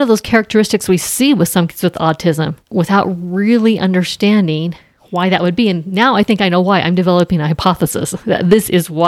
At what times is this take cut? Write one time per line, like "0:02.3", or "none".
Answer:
none